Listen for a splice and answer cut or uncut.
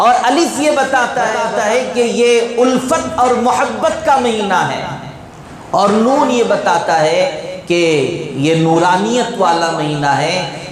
cut